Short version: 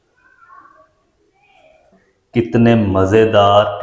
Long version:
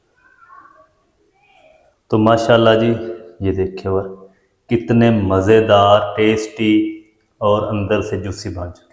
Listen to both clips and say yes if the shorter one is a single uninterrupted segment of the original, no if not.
no